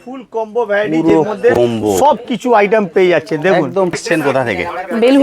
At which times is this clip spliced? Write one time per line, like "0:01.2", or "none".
0:04.0